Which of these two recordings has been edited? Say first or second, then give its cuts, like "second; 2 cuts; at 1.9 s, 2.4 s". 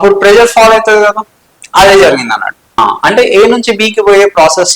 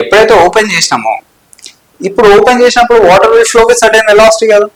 first; 1 cut; at 2.8 s